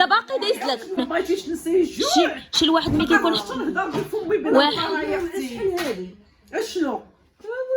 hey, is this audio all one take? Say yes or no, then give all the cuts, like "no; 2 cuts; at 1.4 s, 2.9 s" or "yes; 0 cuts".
no; 1 cut; at 1.0 s